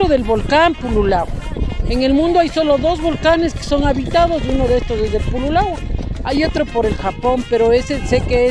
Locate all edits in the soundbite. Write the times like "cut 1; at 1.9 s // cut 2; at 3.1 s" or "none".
none